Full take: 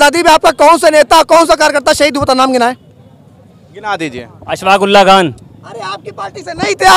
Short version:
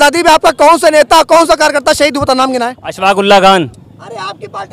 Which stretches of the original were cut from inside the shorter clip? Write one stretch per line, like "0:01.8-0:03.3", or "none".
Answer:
0:02.8-0:04.5